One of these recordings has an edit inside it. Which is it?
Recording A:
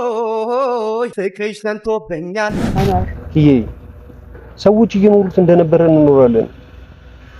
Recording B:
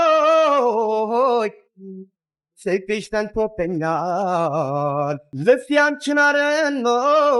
A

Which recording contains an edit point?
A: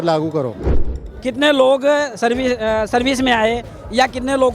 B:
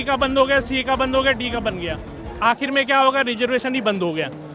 A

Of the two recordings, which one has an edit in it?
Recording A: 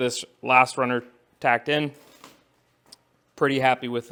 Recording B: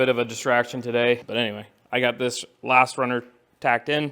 B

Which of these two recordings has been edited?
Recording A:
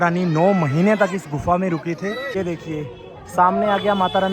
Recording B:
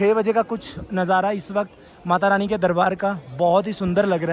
A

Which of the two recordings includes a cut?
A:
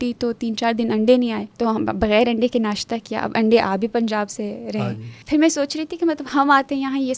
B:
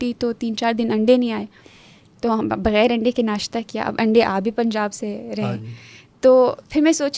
A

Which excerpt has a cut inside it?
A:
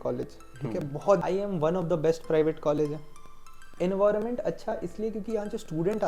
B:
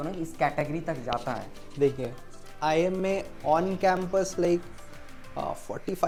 A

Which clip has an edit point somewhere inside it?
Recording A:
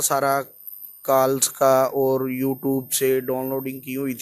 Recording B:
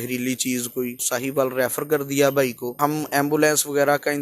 B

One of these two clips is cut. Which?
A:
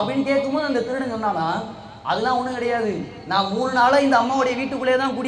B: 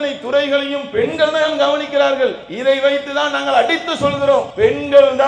B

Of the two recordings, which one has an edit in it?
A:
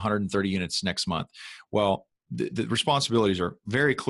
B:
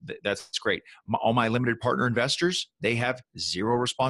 A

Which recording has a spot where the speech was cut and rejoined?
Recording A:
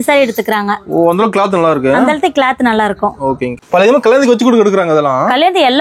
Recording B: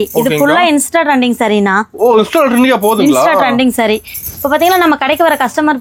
A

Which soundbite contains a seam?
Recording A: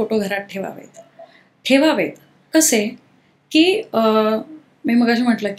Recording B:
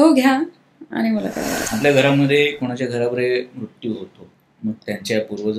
B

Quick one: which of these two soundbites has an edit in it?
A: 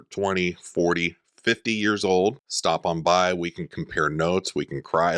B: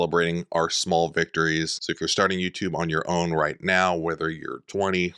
B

